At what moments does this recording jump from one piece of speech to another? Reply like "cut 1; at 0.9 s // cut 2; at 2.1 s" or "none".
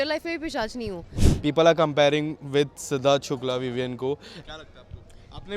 cut 1; at 1.2 s // cut 2; at 4.4 s